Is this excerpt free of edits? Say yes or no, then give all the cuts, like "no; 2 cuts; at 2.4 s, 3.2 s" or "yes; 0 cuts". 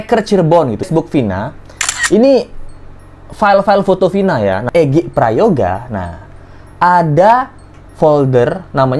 no; 2 cuts; at 0.9 s, 4.6 s